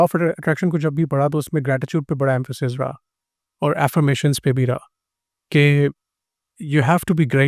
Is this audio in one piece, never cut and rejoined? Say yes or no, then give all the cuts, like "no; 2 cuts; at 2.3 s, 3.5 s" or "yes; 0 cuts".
yes; 0 cuts